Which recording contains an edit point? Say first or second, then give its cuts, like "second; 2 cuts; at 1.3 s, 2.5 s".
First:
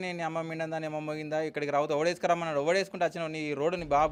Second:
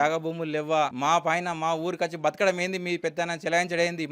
second; 1 cut; at 0.9 s